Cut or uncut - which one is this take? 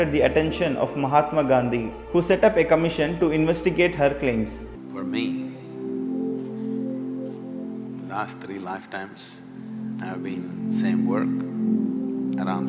cut